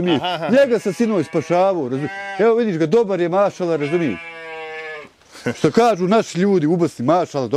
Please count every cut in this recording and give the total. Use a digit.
0